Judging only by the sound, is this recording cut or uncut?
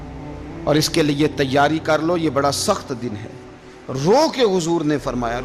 uncut